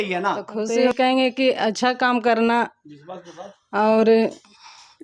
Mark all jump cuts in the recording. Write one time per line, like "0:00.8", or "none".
0:00.9